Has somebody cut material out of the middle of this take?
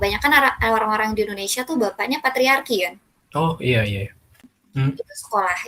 yes; 1 cut; at 4.3 s

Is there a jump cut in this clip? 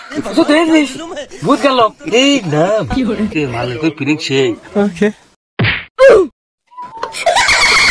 no; 0 cuts

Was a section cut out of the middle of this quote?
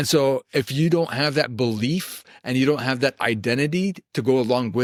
no; 0 cuts

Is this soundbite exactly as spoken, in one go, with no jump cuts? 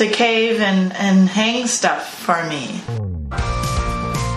no; 1 cut; at 2.9 s

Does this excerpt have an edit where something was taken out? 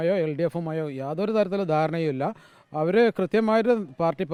no; 0 cuts

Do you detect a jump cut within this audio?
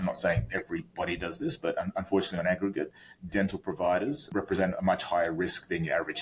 yes; 1 cut; at 4.2 s

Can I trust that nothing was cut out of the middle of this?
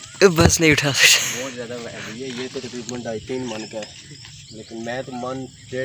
yes; 0 cuts

